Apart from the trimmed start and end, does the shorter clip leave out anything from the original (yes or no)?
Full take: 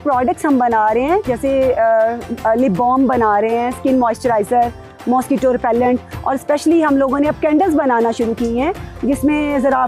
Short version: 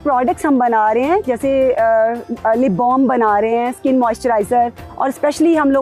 yes